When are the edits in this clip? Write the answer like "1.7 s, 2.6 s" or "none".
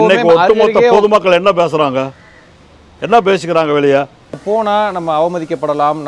4.4 s